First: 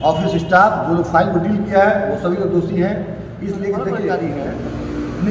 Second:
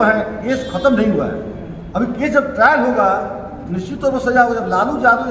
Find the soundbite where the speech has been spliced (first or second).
first